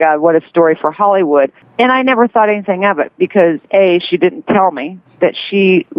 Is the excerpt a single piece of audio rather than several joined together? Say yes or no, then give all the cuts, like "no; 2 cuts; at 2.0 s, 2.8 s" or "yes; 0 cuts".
no; 1 cut; at 1.6 s